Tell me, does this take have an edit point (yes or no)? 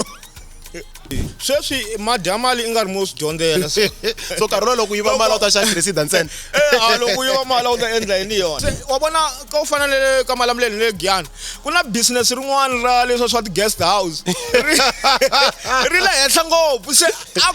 yes